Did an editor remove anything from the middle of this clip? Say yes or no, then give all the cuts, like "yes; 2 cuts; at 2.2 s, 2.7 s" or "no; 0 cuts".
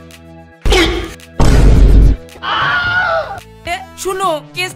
yes; 1 cut; at 3.8 s